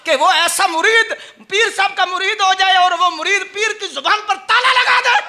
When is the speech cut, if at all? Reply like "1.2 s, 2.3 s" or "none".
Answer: none